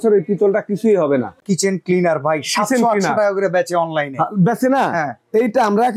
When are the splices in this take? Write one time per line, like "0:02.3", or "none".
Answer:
0:01.4